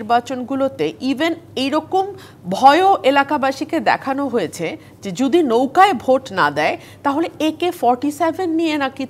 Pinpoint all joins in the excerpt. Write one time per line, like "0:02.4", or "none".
none